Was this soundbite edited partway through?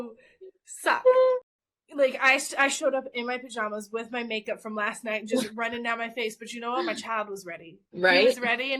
yes; 1 cut; at 1.4 s

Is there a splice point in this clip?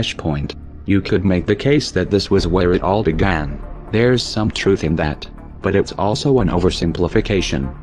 no; 0 cuts

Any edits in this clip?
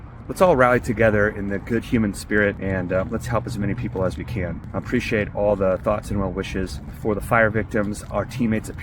yes; 3 cuts; at 2.6 s, 4.6 s, 6.9 s

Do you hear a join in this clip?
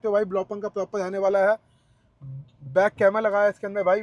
no; 0 cuts

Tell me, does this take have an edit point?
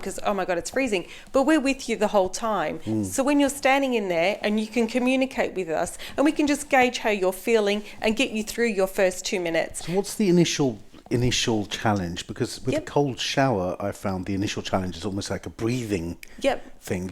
no; 0 cuts

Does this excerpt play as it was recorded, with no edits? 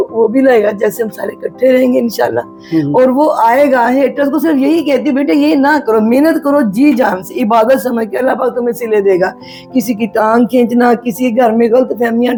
yes; 0 cuts

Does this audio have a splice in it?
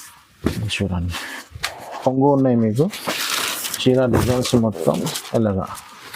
yes; 1 cut; at 1.9 s

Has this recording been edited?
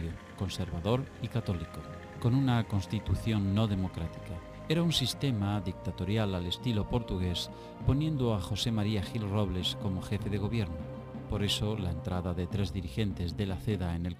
no; 0 cuts

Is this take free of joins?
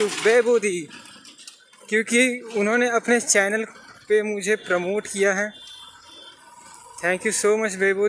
yes; 0 cuts

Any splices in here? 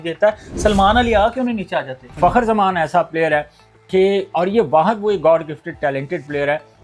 yes; 1 cut; at 2.1 s

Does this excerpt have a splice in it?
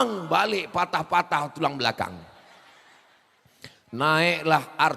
no; 0 cuts

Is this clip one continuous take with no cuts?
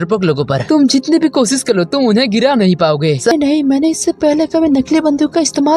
no; 1 cut; at 3.3 s

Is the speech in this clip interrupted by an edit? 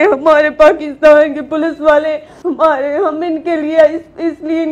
yes; 1 cut; at 2.3 s

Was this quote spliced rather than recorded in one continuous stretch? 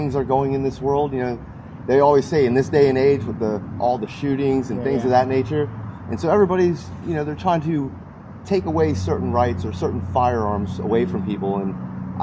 no; 0 cuts

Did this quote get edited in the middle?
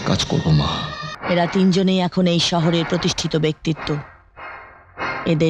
yes; 1 cut; at 1.1 s

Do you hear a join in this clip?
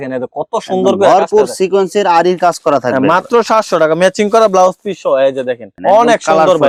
no; 0 cuts

